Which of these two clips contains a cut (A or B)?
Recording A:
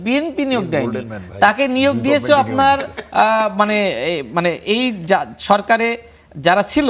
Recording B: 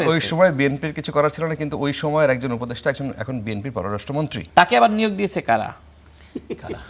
B